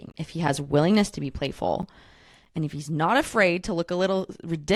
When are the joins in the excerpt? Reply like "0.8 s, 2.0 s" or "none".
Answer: none

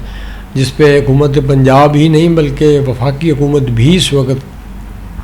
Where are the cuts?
none

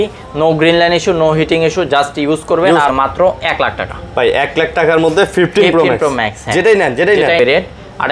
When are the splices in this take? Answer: 2.9 s, 7.4 s

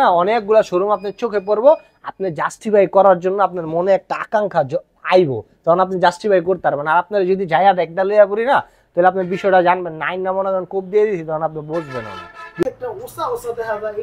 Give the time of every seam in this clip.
12.6 s

